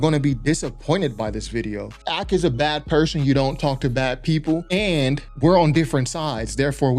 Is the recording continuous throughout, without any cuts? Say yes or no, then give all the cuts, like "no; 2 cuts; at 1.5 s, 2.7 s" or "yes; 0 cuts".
no; 2 cuts; at 2.0 s, 4.6 s